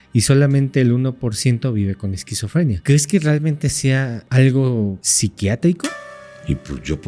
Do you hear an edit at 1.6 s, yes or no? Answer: no